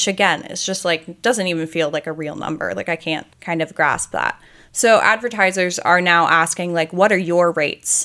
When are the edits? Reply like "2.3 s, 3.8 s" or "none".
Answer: 3.3 s